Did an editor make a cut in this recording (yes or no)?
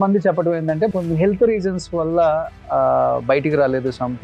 yes